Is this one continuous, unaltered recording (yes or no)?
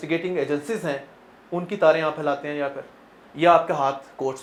yes